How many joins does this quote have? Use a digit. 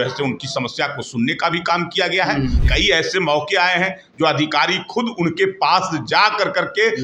1